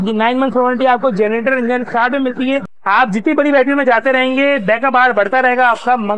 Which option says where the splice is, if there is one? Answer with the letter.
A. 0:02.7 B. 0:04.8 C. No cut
A